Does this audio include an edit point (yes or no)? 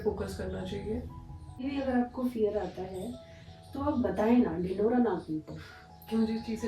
yes